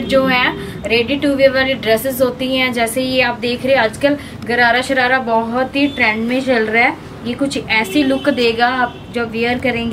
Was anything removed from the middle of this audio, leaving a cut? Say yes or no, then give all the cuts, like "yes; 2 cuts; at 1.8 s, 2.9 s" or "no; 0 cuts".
no; 0 cuts